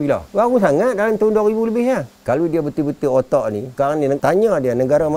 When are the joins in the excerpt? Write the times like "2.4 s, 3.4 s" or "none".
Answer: 2.1 s